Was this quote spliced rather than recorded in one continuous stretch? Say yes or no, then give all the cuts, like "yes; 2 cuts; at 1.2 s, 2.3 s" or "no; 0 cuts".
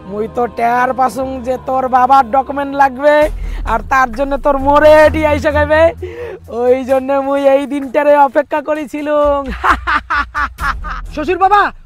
no; 0 cuts